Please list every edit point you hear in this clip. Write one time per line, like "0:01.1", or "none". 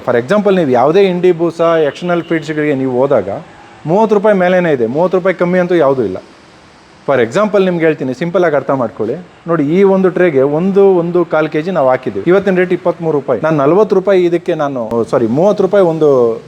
0:12.1
0:13.4
0:14.8